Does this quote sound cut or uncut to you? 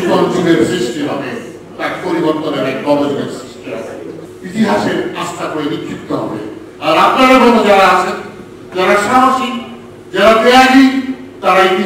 cut